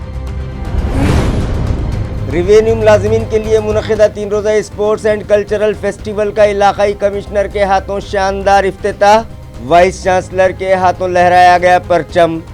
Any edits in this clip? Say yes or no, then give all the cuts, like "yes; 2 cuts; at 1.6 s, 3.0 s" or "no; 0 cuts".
yes; 1 cut; at 1.4 s